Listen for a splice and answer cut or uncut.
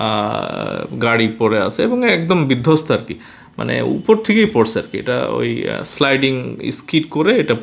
uncut